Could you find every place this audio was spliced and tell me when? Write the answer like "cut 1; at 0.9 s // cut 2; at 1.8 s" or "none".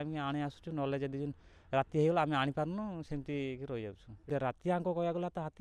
cut 1; at 4.3 s